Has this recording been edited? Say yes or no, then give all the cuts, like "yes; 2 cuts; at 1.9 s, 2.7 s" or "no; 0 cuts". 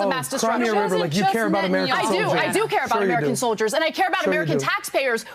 no; 0 cuts